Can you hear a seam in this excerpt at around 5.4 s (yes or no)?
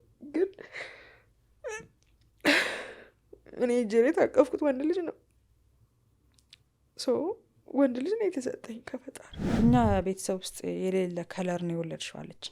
no